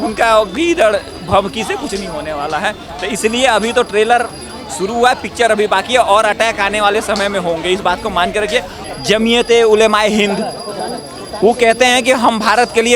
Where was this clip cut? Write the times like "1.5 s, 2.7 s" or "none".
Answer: 8.7 s